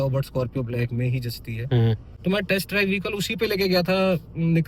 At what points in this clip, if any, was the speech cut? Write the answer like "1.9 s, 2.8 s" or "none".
2.1 s